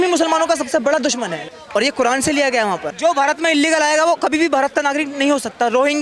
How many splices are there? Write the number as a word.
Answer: two